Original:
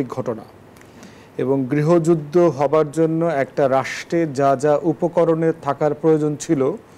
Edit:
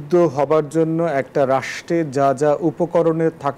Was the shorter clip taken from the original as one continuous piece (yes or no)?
yes